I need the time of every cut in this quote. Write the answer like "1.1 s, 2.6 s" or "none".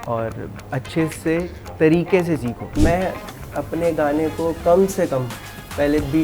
2.8 s